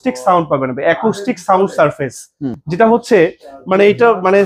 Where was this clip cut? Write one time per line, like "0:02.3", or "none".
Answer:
none